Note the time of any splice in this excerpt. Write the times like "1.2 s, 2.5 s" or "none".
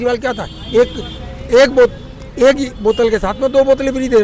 none